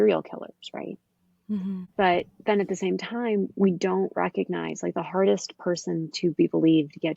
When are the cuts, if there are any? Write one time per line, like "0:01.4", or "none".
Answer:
0:01.9